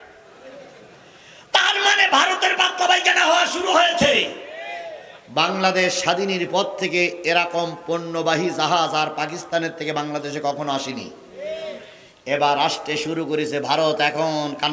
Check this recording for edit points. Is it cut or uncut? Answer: uncut